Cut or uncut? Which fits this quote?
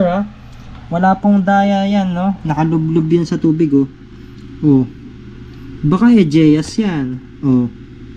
uncut